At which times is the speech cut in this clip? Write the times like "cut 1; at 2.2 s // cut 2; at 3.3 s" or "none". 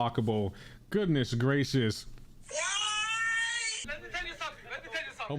cut 1; at 3.9 s